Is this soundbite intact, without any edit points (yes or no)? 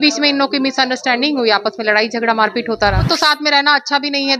no